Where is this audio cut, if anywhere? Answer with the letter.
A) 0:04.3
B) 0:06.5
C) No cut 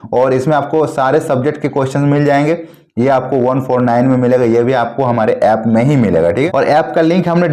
B